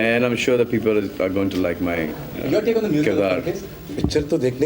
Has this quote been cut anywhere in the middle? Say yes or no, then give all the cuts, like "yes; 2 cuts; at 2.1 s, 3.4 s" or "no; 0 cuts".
yes; 1 cut; at 3.8 s